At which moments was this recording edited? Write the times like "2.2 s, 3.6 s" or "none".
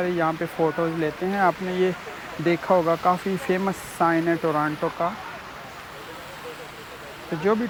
none